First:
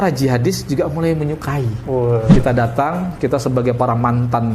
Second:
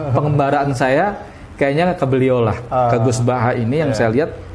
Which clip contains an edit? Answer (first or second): first